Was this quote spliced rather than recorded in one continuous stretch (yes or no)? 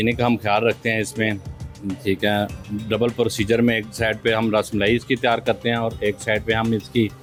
no